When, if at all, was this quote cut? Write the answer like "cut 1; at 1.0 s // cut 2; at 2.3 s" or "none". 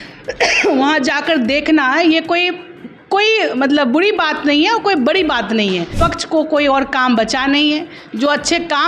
cut 1; at 6.0 s